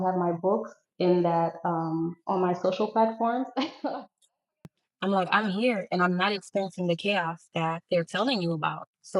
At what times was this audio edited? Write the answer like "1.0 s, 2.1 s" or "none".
4.7 s